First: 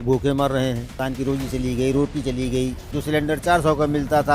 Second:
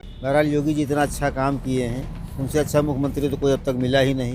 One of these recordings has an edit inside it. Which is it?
first; 2 cuts; at 0.9 s, 2.9 s

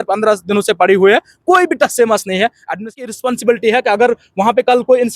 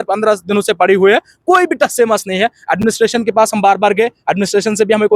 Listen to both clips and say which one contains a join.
first; 1 cut; at 3.0 s

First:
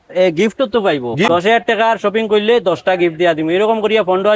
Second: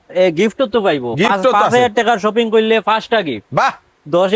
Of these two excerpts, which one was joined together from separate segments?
first; 1 cut; at 1.3 s

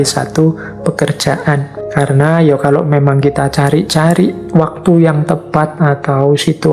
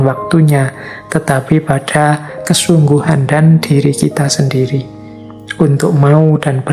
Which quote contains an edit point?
first; 1 cut; at 1.8 s

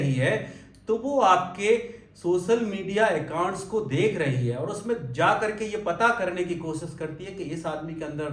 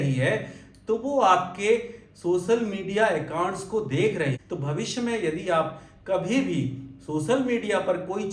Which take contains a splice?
second; 1 cut; at 4.4 s

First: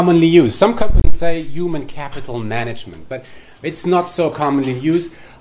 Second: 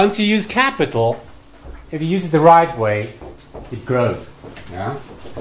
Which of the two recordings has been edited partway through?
second; 1 cut; at 2.6 s

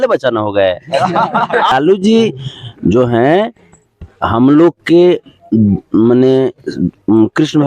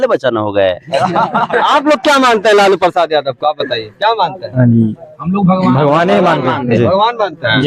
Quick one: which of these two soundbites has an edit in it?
first; 1 cut; at 1.7 s

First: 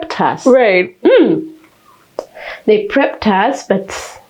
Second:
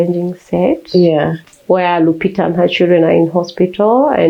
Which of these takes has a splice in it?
second; 1 cut; at 1.5 s

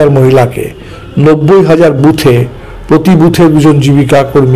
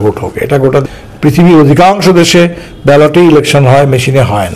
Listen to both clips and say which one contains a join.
second; 1 cut; at 0.9 s

